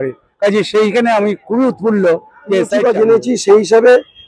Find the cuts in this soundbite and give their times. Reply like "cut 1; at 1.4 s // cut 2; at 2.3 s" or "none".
cut 1; at 3.0 s